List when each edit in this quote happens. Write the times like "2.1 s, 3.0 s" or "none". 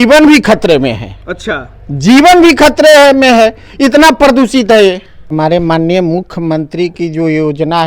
5.3 s